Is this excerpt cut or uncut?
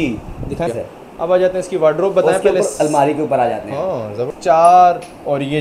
cut